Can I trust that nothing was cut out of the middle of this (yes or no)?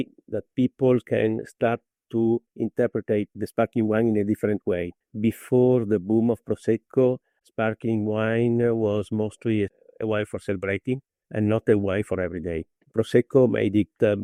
yes